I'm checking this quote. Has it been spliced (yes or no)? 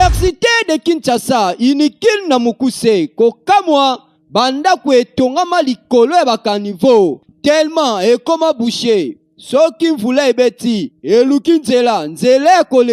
no